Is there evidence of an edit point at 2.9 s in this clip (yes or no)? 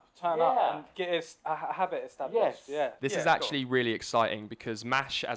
yes